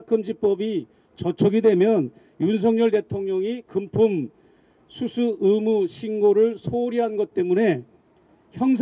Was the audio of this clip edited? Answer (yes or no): no